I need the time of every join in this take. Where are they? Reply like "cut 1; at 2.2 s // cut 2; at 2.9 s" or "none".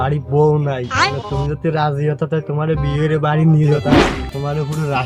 cut 1; at 3.8 s